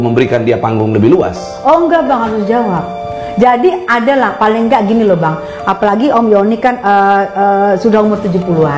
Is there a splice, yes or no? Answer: no